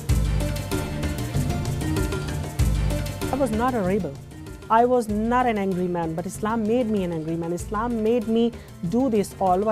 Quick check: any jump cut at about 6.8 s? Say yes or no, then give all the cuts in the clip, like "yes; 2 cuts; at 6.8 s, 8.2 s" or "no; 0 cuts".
no; 0 cuts